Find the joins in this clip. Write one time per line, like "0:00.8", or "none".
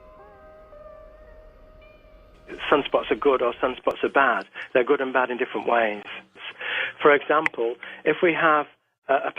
0:03.0